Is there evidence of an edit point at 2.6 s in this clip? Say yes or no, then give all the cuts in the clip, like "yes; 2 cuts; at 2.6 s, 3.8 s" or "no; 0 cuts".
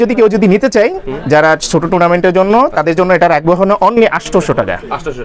no; 0 cuts